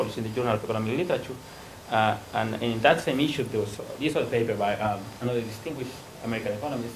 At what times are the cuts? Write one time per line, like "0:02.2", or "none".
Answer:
0:02.0